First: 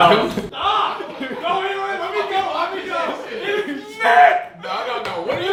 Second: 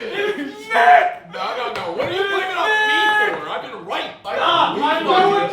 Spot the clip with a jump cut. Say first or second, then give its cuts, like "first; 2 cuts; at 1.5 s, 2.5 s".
second; 1 cut; at 4.2 s